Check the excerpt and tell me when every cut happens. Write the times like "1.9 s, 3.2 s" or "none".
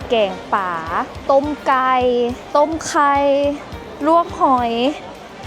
1.1 s, 2.4 s